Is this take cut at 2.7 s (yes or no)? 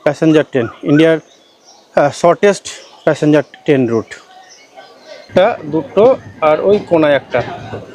no